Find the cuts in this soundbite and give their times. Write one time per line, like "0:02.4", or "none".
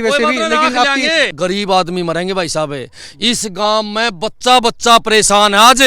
0:01.3